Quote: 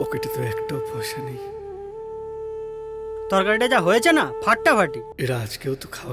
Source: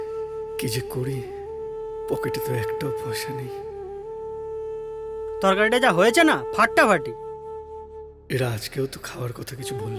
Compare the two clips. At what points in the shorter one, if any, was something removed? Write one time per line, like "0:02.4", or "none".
0:05.1